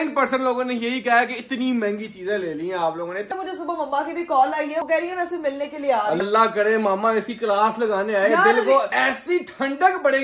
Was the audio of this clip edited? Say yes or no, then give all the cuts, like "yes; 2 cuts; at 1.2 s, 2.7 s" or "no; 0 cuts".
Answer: yes; 3 cuts; at 3.3 s, 4.8 s, 6.3 s